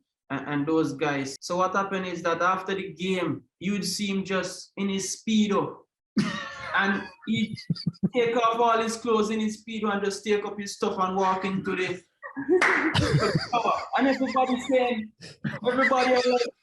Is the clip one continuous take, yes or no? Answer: no